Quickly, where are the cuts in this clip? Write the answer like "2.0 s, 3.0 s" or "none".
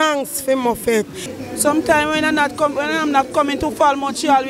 1.3 s